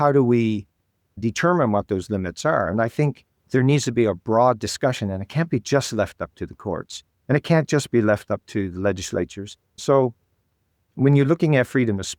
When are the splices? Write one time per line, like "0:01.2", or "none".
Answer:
0:01.2
0:09.8

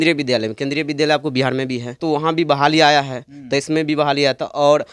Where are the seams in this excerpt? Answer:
0:02.0

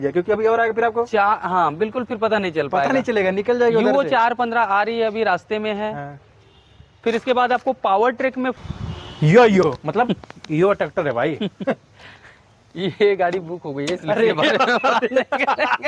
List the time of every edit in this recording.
0:08.6

